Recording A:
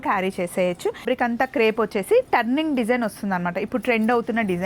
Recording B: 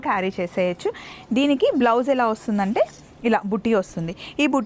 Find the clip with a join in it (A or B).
A